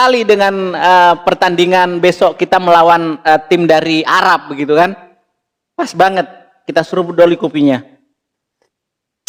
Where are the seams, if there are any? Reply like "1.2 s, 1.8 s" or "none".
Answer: none